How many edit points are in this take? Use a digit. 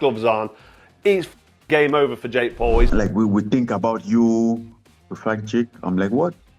1